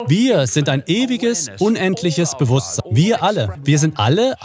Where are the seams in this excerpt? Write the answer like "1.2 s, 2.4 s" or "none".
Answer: 2.8 s, 3.5 s